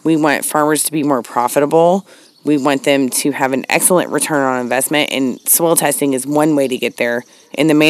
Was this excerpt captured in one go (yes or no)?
yes